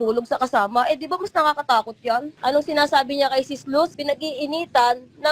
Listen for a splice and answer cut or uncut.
cut